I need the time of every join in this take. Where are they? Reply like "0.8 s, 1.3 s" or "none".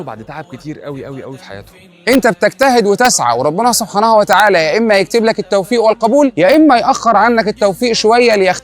2.0 s